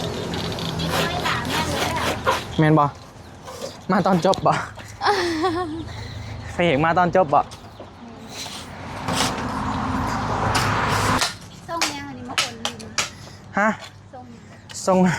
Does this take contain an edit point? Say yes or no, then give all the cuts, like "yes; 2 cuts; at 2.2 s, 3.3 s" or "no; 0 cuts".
yes; 1 cut; at 11.2 s